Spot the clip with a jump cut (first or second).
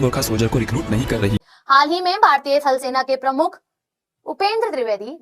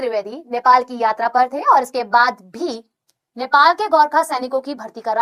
first